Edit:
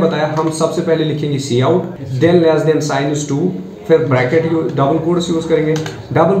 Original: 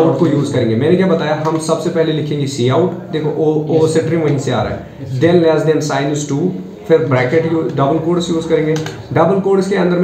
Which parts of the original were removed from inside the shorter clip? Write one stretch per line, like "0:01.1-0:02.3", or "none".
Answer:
0:03.0-0:05.0